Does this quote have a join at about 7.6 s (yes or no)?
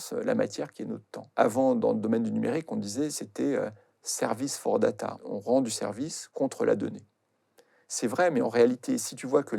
no